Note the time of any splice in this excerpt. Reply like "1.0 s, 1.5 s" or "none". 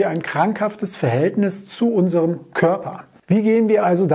3.1 s